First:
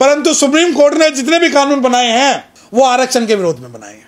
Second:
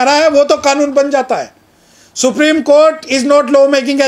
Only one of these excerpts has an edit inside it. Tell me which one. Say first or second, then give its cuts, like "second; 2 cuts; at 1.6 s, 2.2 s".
first; 1 cut; at 2.5 s